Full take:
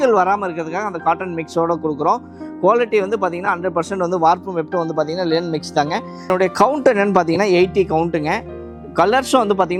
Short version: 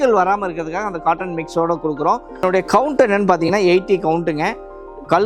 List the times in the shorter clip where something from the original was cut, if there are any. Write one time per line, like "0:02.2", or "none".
0:02.3